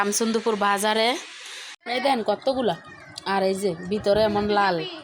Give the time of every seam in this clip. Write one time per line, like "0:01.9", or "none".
0:01.8